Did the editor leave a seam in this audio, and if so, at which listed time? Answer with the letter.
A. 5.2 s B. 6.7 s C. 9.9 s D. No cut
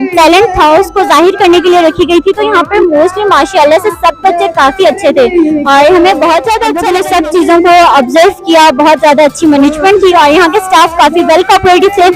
B